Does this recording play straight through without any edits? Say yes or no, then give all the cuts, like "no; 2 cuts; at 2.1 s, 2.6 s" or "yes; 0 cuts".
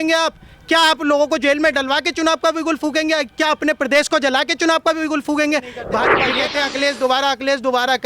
no; 1 cut; at 6.2 s